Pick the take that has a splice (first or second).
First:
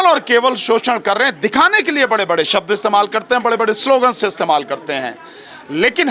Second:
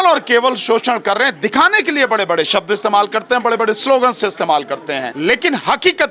second